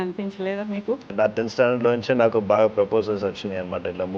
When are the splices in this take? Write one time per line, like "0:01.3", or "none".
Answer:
0:01.1